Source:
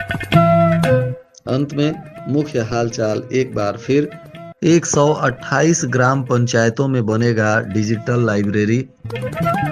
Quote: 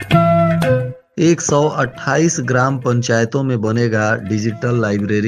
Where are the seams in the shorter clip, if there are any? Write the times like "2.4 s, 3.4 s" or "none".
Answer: 1.0 s